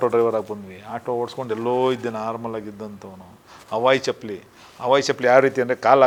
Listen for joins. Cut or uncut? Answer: uncut